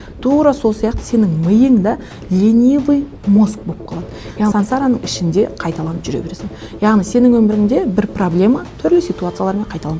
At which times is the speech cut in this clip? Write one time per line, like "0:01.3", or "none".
0:04.5